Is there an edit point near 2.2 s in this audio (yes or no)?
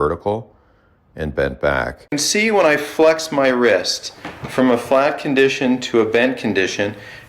yes